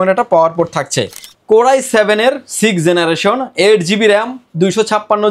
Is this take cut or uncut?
cut